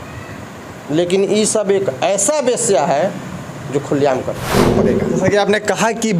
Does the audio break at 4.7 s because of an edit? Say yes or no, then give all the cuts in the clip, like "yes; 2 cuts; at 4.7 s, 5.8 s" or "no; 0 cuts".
yes; 1 cut; at 4.7 s